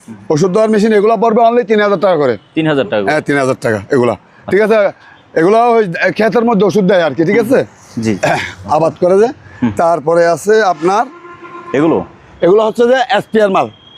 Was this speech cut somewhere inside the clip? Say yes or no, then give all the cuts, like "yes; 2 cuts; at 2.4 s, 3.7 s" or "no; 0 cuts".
no; 0 cuts